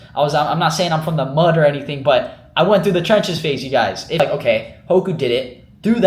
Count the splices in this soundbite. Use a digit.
1